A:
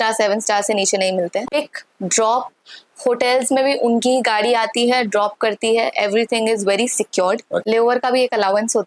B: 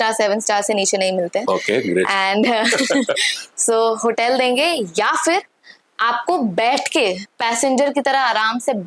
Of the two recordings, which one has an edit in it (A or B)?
A